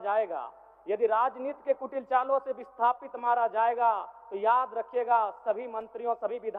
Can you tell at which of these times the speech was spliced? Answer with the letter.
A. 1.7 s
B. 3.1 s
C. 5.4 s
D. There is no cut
D